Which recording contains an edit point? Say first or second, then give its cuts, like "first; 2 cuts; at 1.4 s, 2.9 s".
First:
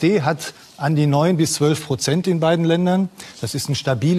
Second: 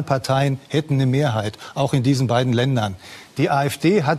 second; 1 cut; at 1.6 s